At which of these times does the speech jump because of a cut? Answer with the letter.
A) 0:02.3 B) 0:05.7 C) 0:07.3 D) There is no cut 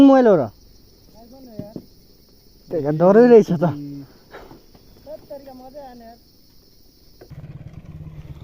C